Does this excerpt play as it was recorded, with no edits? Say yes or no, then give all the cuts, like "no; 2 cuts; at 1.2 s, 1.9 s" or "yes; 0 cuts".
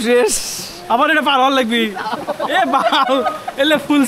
yes; 0 cuts